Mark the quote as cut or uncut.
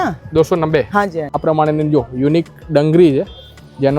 cut